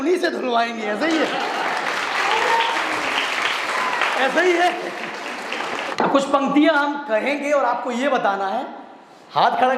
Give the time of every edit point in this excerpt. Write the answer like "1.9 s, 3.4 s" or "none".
5.8 s